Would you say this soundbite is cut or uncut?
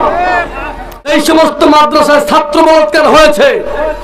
cut